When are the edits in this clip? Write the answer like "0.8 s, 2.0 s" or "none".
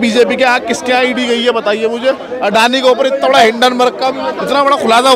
2.3 s, 4.1 s